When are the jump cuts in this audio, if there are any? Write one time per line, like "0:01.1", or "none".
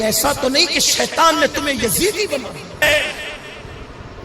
0:02.8